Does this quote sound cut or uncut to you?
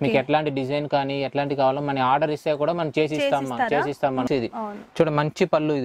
cut